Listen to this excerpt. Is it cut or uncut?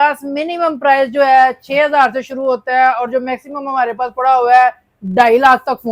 uncut